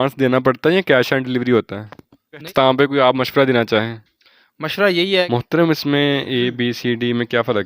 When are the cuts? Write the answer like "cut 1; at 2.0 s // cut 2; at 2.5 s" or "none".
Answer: cut 1; at 2.5 s // cut 2; at 5.3 s